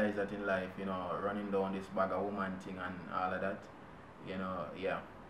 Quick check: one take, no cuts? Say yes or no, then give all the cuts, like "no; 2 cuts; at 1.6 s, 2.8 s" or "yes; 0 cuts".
yes; 0 cuts